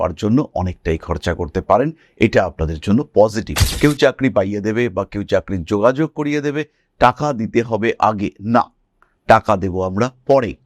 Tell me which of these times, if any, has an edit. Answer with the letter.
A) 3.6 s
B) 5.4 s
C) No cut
A